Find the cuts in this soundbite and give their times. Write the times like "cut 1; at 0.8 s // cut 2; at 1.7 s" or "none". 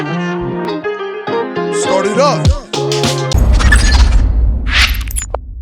cut 1; at 3.4 s